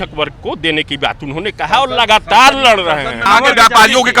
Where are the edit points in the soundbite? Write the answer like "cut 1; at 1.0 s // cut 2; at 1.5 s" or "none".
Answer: cut 1; at 3.2 s